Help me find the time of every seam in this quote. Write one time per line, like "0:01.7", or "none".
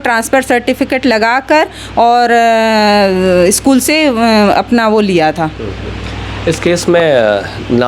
none